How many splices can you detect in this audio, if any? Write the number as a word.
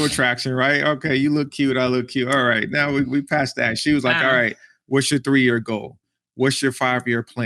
zero